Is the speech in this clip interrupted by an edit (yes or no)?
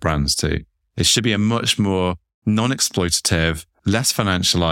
yes